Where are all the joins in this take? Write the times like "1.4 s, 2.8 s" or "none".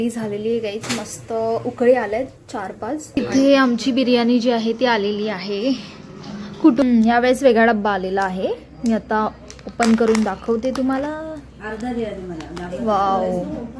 3.2 s, 6.8 s

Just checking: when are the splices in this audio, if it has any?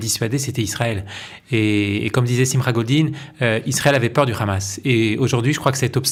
none

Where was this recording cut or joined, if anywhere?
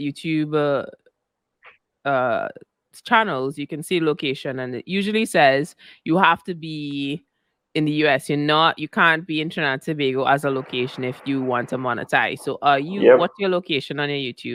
none

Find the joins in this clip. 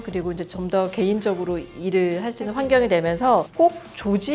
none

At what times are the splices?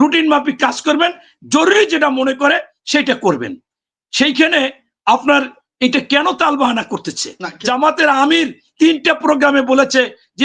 7.5 s

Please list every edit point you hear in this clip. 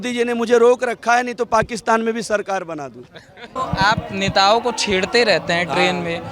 none

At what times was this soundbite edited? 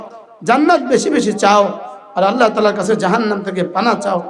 none

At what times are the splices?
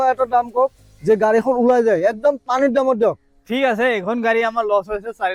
none

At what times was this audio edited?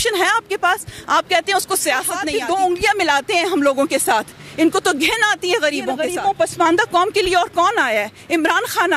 2.3 s, 6.0 s

